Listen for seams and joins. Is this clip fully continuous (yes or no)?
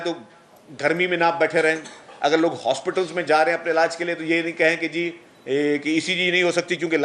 yes